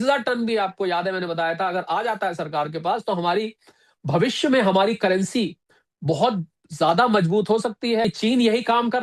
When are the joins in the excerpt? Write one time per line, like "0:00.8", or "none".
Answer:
0:08.0